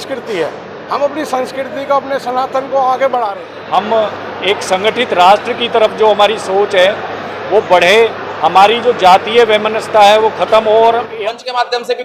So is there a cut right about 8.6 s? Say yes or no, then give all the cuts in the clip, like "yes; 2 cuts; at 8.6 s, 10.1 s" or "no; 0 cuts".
no; 2 cuts; at 3.5 s, 11.2 s